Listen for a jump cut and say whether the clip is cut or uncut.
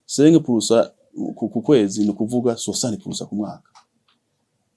uncut